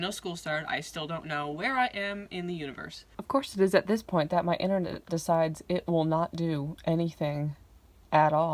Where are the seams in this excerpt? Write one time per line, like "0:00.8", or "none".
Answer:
0:03.1

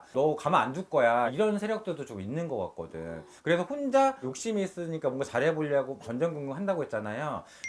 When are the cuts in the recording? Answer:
none

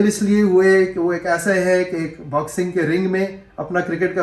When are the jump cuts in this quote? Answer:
none

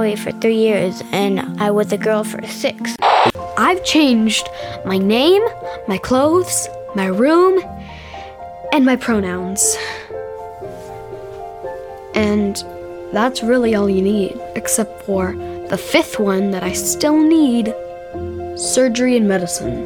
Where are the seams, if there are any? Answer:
none

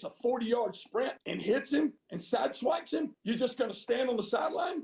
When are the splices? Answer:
0:01.7
0:03.1

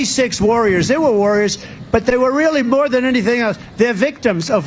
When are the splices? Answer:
none

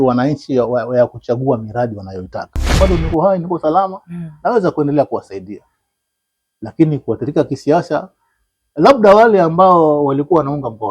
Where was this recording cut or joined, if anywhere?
0:02.8

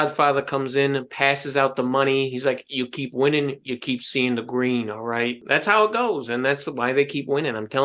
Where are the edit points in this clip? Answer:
0:05.4

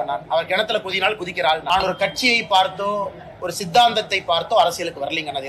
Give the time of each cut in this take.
0:01.6

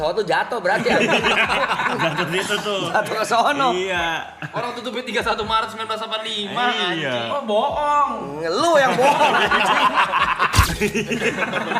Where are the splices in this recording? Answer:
0:10.7

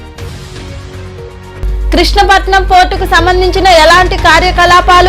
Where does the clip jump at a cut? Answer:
0:01.6

